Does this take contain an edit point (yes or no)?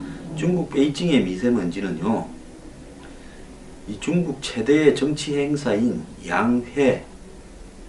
yes